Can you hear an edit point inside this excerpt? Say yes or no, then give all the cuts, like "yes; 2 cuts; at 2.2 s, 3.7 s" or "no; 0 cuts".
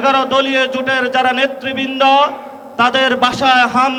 no; 0 cuts